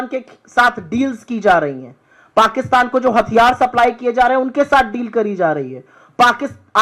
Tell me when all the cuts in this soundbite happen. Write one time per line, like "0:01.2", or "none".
none